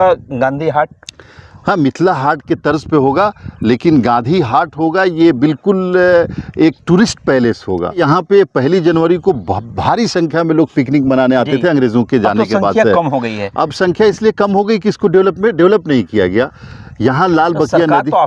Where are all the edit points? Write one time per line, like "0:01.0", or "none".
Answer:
0:08.0